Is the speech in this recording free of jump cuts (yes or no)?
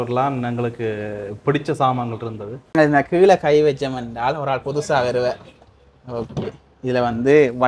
no